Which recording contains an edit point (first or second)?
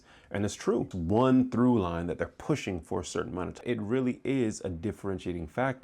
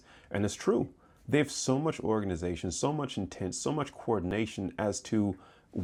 first